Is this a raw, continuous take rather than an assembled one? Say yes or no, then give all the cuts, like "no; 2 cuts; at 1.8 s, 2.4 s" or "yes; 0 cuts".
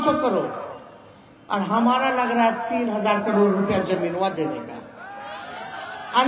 yes; 0 cuts